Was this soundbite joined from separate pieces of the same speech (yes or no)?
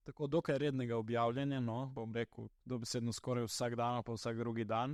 no